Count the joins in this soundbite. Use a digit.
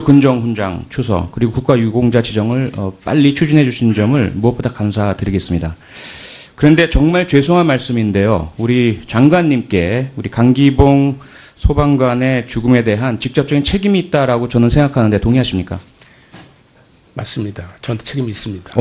1